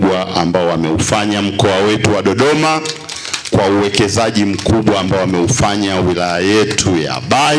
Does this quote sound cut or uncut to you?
uncut